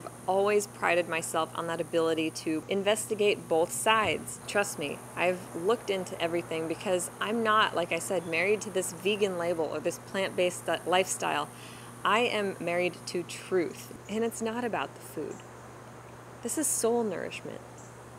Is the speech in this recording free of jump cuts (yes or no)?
no